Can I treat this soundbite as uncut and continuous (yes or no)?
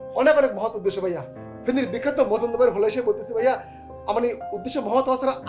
yes